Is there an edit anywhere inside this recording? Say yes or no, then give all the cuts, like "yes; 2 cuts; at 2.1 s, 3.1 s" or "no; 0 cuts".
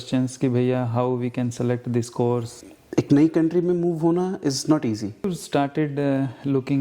yes; 2 cuts; at 2.7 s, 5.3 s